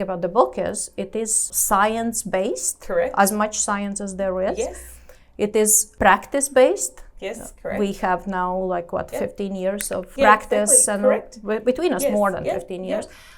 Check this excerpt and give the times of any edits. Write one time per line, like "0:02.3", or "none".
0:01.4
0:05.8
0:10.1